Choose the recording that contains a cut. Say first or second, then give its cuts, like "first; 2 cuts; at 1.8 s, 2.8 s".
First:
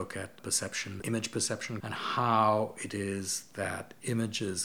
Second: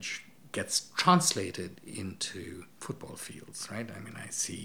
first; 2 cuts; at 1.0 s, 1.8 s